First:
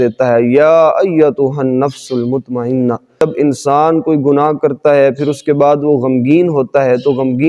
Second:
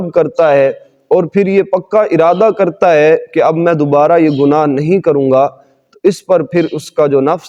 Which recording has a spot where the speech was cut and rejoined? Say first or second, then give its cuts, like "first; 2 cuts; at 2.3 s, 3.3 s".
first; 1 cut; at 3.2 s